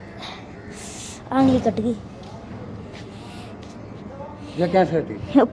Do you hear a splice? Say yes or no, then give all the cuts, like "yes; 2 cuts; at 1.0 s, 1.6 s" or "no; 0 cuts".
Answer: no; 0 cuts